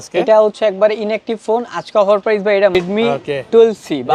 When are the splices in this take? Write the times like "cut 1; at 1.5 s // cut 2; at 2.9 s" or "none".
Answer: cut 1; at 2.7 s